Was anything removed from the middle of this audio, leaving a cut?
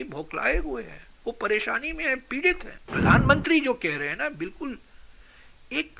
yes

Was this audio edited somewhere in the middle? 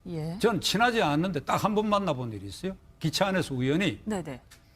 yes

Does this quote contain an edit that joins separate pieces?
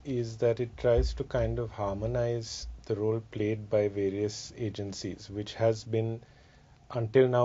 no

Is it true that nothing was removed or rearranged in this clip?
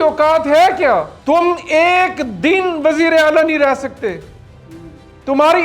no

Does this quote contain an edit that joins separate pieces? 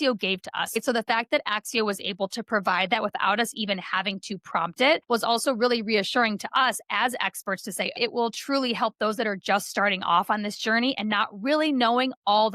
yes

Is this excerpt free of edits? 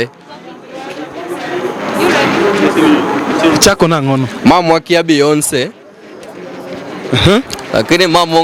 yes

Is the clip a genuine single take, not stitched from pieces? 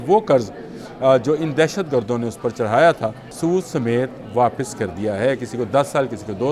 no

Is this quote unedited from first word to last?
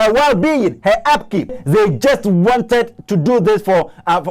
no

